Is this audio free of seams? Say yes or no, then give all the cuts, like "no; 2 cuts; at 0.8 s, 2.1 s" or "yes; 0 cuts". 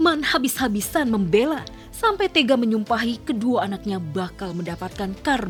yes; 0 cuts